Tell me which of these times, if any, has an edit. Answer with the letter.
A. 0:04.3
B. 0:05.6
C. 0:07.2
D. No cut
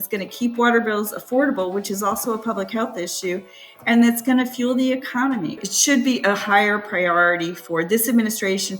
B